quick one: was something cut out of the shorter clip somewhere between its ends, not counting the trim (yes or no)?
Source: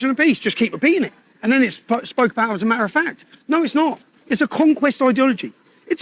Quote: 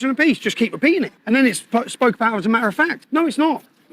yes